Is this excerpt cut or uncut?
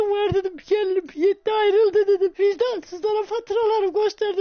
cut